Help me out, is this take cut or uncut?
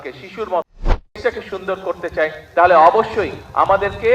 cut